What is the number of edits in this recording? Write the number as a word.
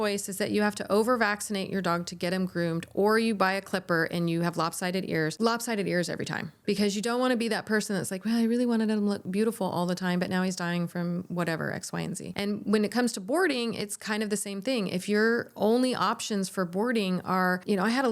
zero